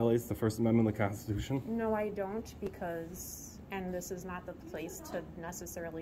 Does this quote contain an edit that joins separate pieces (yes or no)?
no